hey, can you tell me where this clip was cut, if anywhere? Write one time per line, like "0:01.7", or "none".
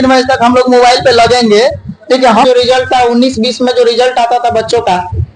0:02.4